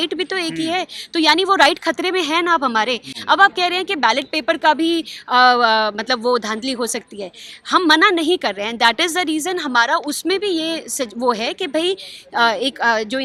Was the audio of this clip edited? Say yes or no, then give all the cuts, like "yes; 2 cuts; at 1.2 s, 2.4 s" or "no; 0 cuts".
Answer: no; 0 cuts